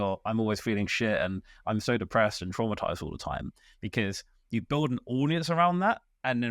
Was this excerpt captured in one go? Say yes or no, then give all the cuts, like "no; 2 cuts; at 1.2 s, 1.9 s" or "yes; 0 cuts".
yes; 0 cuts